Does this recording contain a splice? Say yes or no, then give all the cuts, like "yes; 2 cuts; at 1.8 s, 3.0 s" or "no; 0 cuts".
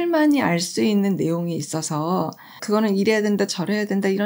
no; 0 cuts